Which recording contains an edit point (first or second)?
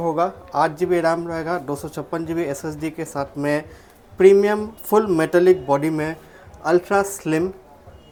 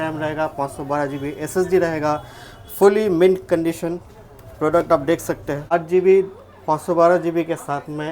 second